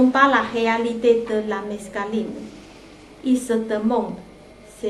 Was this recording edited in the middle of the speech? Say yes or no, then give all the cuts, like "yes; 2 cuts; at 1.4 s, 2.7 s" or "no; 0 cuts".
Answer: yes; 1 cut; at 0.9 s